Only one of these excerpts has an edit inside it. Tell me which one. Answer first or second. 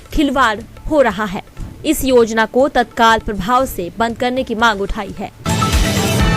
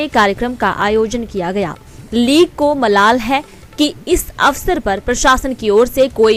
first